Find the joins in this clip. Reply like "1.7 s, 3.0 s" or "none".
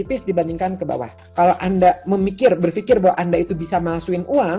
1.2 s